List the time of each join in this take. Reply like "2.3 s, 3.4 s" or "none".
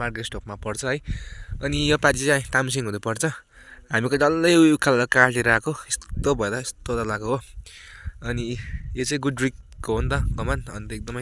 none